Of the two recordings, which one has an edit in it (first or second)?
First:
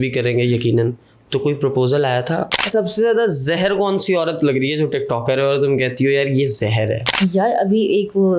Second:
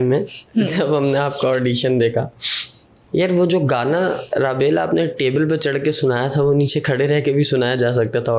first